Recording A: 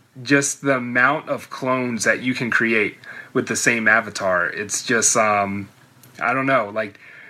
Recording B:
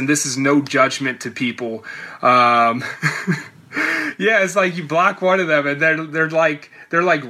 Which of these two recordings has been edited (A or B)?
A